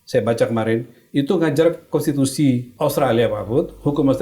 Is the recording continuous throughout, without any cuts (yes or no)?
no